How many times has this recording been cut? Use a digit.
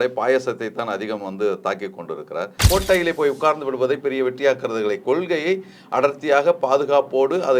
1